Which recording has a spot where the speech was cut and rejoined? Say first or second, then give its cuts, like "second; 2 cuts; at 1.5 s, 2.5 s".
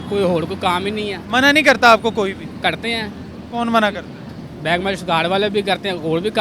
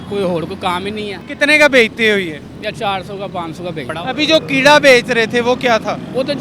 second; 2 cuts; at 1.2 s, 3.9 s